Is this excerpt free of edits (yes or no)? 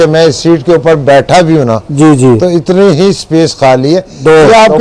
yes